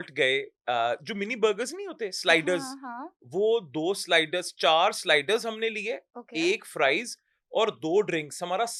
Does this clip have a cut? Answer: no; 0 cuts

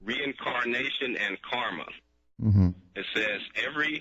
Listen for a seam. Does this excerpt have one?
yes; 1 cut; at 2.7 s

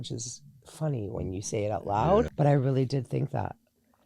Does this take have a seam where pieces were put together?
yes; 1 cut; at 2.3 s

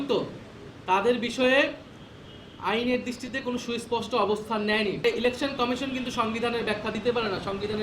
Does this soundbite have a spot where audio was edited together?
yes; 1 cut; at 5.0 s

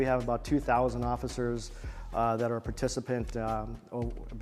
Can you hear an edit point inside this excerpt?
no; 0 cuts

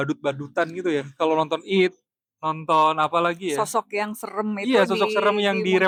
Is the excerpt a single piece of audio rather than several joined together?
yes; 0 cuts

